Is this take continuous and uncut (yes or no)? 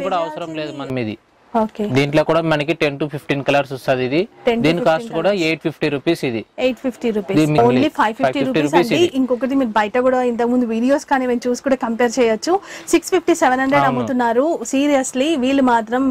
no